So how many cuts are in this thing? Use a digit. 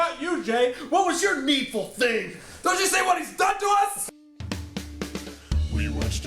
1